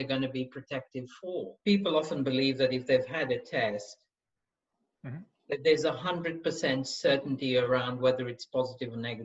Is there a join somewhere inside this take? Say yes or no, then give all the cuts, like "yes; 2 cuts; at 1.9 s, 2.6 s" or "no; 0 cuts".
yes; 1 cut; at 1.5 s